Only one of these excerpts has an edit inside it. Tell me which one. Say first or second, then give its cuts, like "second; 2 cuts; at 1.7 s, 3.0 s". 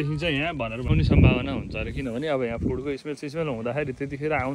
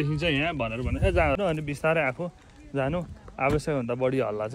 first; 1 cut; at 0.9 s